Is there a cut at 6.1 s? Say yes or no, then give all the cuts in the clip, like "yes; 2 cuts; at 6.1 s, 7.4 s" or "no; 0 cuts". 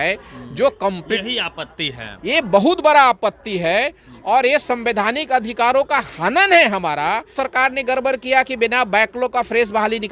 no; 1 cut; at 7.3 s